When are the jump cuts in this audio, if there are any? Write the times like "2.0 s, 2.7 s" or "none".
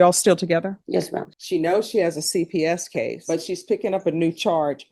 0.9 s